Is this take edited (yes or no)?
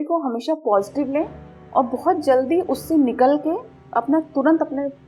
no